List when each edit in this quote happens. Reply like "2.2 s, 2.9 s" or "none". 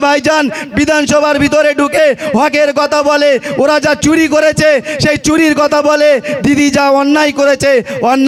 none

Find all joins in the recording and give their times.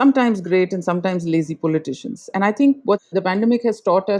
3.1 s

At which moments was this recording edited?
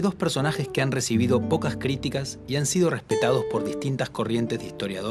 none

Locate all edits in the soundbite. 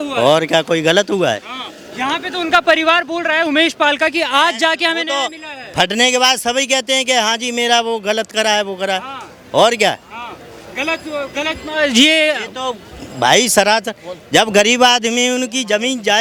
none

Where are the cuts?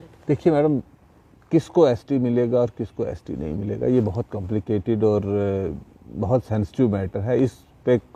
none

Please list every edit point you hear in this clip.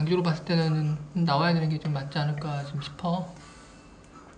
none

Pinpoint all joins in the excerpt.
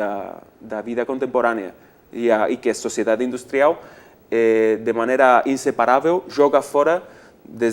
none

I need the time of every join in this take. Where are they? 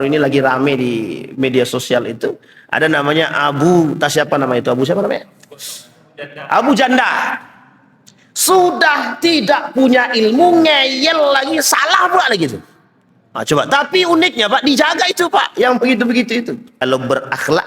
16.7 s

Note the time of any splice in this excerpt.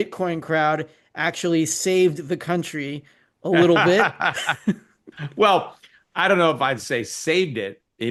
none

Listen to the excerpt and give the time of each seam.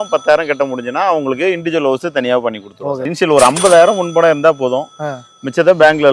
3.1 s

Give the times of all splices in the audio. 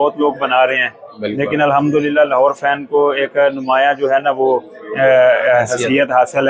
none

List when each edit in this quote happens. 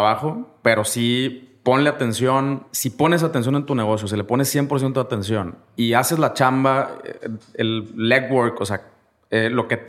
2.6 s, 5.6 s

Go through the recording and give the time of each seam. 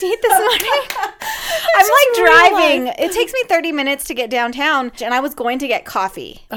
5.0 s

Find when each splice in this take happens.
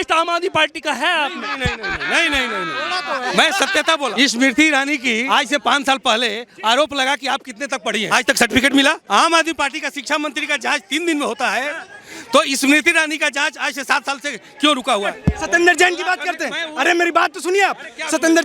4.2 s, 5.2 s, 8.1 s, 9.0 s, 15.2 s

